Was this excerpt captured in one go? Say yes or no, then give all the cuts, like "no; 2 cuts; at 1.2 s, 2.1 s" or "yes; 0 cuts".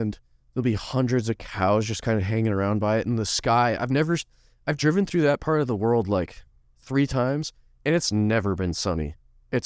yes; 0 cuts